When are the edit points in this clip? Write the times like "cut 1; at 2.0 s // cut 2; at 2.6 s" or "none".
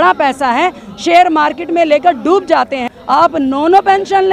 cut 1; at 2.9 s